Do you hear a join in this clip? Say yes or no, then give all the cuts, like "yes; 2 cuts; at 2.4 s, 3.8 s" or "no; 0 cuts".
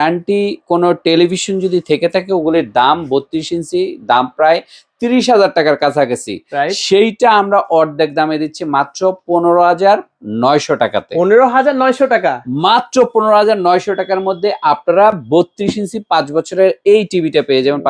no; 0 cuts